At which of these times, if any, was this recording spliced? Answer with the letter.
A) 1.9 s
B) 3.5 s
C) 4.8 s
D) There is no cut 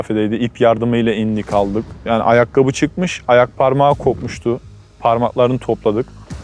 A